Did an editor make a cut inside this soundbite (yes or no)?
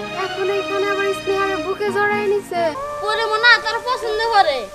yes